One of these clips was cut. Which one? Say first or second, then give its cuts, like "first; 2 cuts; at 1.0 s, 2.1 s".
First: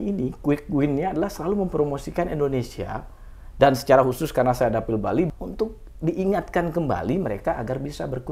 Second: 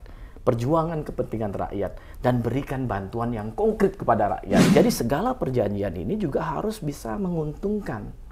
second; 1 cut; at 4.7 s